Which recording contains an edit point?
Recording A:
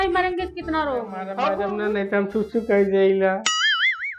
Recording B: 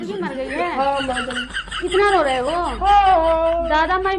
A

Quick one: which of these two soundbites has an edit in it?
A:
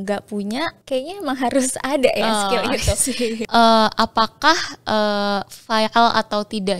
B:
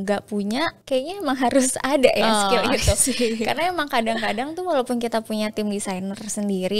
A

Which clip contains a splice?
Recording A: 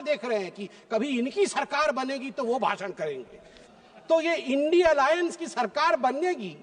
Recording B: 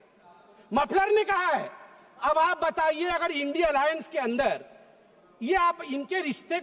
A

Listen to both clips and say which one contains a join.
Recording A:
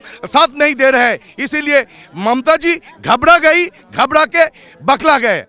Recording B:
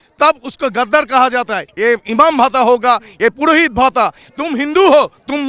B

